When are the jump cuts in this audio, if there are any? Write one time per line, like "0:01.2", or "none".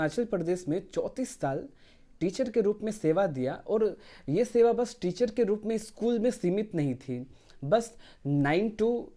none